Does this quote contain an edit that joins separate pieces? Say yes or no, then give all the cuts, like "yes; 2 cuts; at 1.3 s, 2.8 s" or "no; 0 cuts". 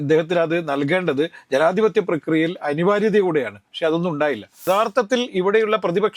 yes; 1 cut; at 4.7 s